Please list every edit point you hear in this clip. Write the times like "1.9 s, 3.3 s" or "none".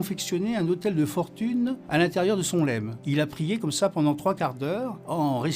none